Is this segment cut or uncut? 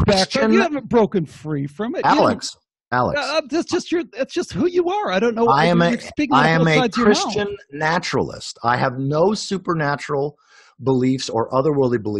uncut